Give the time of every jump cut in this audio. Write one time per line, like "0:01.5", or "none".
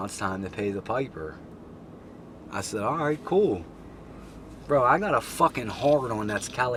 none